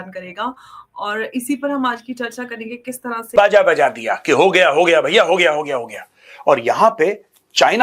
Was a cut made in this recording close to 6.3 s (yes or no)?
no